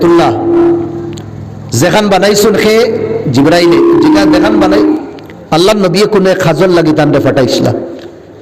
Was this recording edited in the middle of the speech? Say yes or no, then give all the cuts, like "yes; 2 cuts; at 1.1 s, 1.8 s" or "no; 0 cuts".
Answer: yes; 1 cut; at 4.9 s